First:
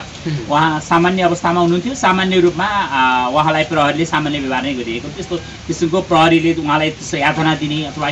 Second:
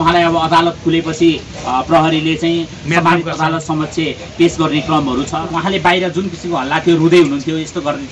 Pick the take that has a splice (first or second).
second